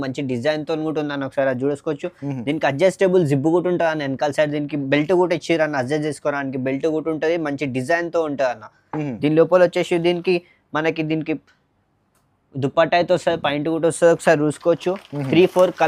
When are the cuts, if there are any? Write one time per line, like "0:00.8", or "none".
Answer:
none